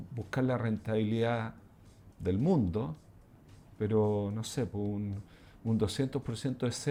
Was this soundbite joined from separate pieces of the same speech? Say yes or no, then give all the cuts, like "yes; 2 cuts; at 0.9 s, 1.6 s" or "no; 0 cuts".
no; 0 cuts